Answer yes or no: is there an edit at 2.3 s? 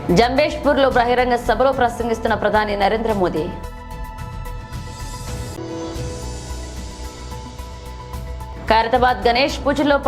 no